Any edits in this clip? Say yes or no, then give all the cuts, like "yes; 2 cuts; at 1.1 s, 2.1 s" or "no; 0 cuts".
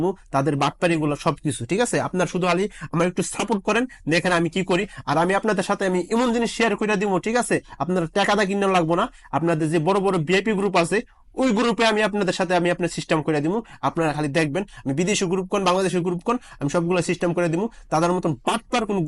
no; 0 cuts